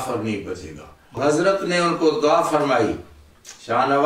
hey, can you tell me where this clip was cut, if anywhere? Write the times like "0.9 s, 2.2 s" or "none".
1.2 s